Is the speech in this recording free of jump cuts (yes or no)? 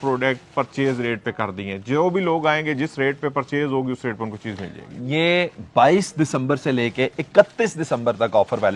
yes